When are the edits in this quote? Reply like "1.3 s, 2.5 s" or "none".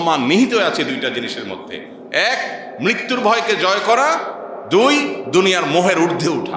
none